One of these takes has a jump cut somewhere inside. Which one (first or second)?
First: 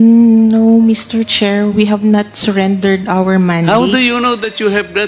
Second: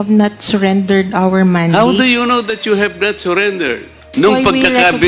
second